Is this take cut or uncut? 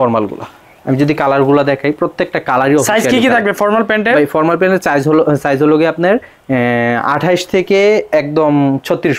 uncut